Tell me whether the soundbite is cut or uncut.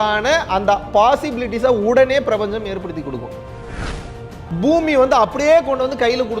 cut